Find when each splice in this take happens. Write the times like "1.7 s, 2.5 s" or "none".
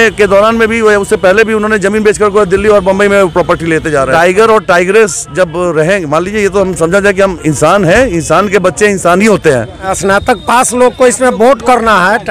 4.1 s, 9.9 s